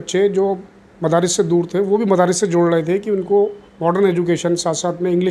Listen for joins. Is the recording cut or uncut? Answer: uncut